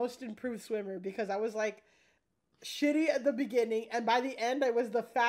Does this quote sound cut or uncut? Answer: uncut